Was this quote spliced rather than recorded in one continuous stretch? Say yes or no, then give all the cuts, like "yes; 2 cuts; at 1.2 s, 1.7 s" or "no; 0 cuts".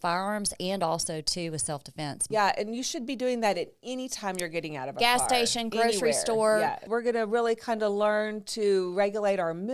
yes; 2 cuts; at 2.2 s, 6.8 s